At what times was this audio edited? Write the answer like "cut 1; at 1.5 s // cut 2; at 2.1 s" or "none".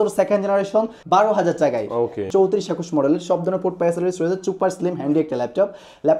cut 1; at 1.0 s // cut 2; at 2.2 s